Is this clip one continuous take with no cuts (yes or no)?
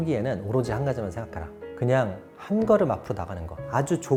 yes